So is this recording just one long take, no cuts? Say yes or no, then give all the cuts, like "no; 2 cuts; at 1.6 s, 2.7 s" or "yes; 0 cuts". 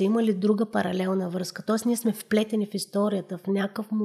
yes; 0 cuts